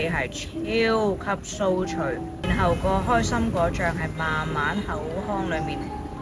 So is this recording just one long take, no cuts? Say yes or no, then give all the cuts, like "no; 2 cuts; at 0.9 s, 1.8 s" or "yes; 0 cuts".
no; 1 cut; at 2.3 s